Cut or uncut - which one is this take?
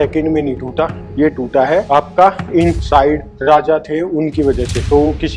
uncut